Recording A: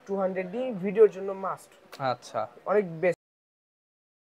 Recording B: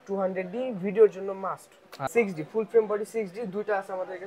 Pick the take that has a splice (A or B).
B